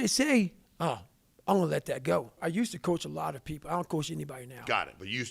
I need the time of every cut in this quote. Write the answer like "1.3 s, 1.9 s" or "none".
2.4 s